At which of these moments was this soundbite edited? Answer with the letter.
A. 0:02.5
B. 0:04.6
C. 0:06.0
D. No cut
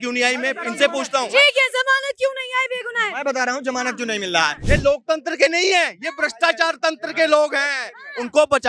B